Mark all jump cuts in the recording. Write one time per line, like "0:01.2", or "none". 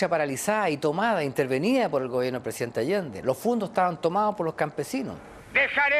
0:04.1